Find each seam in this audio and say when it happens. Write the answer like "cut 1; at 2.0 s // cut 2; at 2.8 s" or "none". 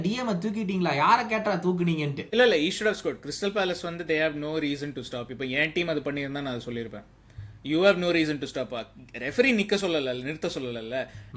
cut 1; at 2.2 s

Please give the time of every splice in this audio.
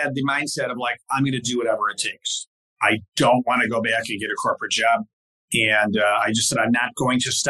cut 1; at 2.3 s

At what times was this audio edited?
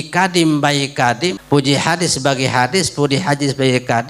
cut 1; at 1.4 s

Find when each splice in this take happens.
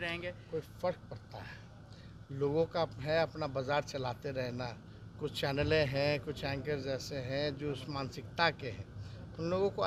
none

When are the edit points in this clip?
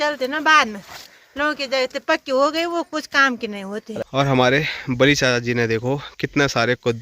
cut 1; at 4.0 s

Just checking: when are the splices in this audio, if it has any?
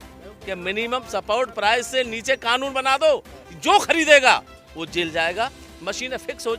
cut 1; at 5.7 s

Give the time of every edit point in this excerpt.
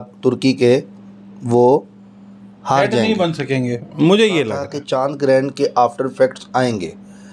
cut 1; at 4.7 s

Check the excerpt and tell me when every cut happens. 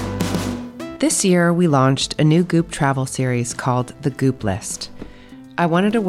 cut 1; at 0.9 s

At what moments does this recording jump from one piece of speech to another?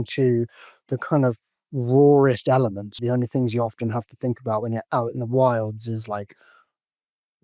cut 1; at 3.0 s

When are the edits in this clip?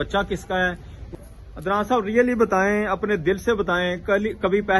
cut 1; at 0.9 s

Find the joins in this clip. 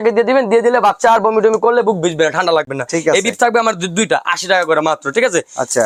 none

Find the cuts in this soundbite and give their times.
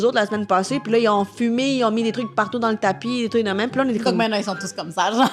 none

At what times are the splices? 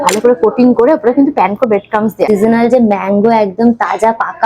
cut 1; at 2.3 s

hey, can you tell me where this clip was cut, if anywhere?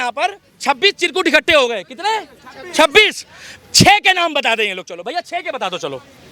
none

